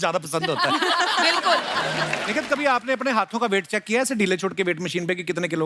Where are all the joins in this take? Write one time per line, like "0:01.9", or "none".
0:02.2